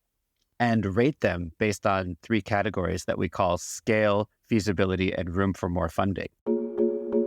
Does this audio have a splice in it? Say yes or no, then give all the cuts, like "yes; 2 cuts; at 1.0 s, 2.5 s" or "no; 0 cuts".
yes; 1 cut; at 6.3 s